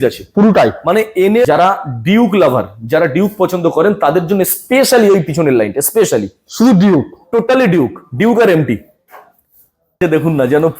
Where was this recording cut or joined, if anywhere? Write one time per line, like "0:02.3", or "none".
0:01.5
0:10.0